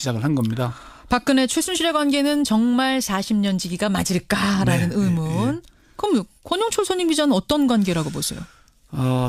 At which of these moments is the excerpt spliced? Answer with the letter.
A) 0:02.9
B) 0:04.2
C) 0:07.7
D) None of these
B